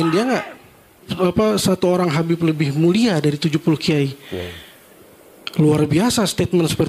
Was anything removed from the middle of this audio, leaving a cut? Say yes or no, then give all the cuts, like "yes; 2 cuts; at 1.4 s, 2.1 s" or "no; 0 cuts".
yes; 1 cut; at 1.1 s